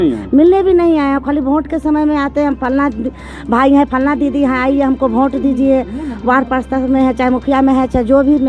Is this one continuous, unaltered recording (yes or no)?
yes